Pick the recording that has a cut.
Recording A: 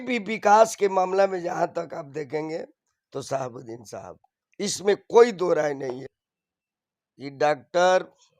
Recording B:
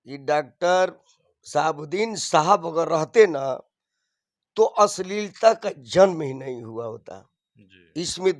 A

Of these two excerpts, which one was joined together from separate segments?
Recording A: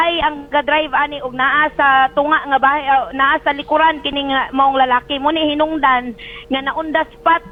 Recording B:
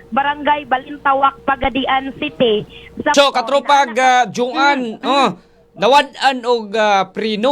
B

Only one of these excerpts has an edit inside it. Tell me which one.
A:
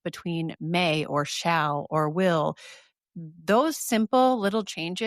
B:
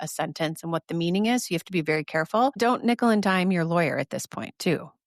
B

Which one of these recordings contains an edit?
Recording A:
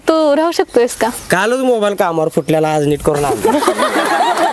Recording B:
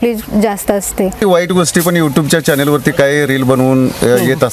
B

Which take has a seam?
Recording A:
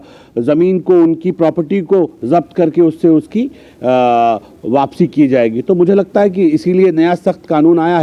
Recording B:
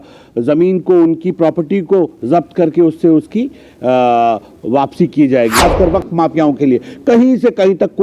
B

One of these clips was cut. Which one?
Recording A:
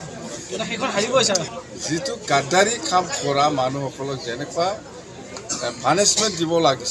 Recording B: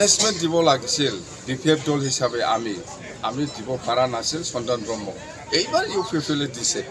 A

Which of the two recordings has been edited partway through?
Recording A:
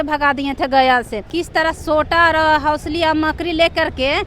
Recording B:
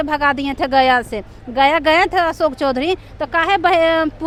A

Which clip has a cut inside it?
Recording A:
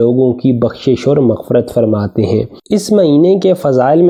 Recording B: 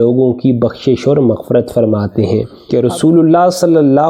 B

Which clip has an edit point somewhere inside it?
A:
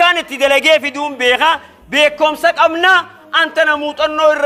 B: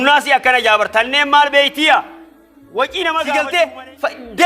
B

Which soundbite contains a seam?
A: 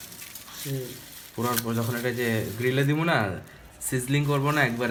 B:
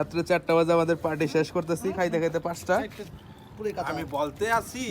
B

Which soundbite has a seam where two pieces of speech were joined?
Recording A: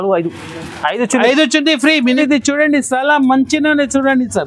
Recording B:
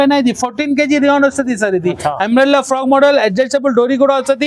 A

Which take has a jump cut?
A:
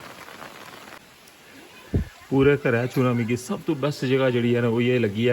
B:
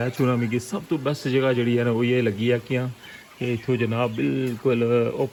A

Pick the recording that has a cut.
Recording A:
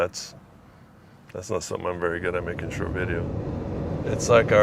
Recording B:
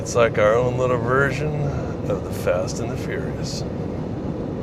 A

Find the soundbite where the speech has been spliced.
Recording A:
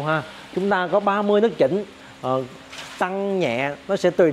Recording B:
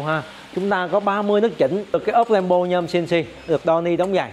B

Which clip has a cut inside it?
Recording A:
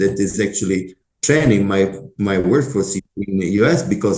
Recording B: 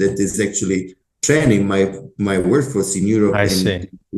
A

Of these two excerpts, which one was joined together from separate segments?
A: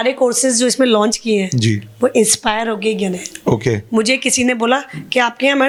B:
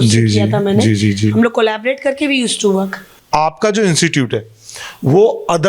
B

